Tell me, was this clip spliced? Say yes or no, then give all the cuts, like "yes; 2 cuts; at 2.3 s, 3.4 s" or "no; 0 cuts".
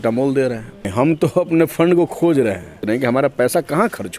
yes; 2 cuts; at 0.9 s, 2.8 s